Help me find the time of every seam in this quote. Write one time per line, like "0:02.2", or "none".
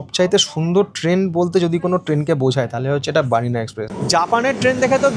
0:03.9